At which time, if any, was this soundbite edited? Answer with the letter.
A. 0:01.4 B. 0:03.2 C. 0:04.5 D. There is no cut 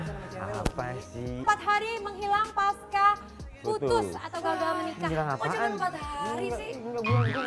A